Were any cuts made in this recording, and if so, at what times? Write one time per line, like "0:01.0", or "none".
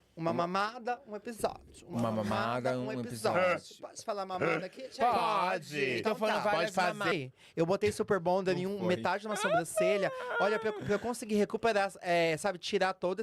0:07.1